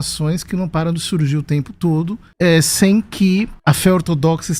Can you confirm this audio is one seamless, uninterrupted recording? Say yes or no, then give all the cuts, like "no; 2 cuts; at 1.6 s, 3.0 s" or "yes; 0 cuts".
no; 2 cuts; at 2.2 s, 3.5 s